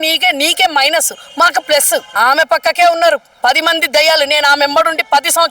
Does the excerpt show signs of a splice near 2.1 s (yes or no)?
yes